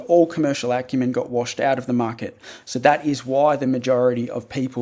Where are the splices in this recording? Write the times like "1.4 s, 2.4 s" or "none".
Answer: 1.5 s